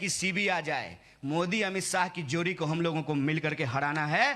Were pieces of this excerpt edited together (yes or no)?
no